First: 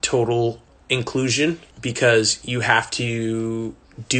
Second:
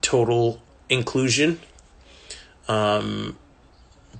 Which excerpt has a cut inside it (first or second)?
first